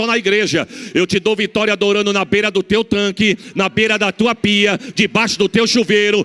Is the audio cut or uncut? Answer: uncut